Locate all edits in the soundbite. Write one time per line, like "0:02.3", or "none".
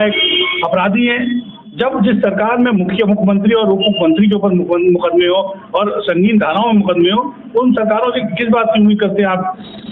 none